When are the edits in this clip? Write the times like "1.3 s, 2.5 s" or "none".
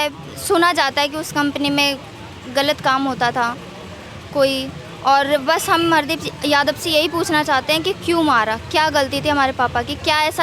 none